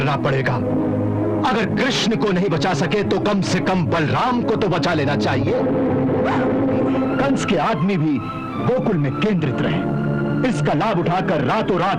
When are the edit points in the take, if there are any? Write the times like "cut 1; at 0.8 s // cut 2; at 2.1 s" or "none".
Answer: cut 1; at 7.2 s